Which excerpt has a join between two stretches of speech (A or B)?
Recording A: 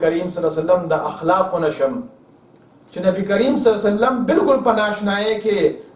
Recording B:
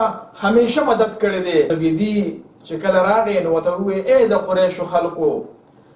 B